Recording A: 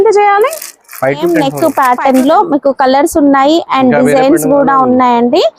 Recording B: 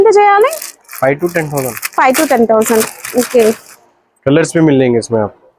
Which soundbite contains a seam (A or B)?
A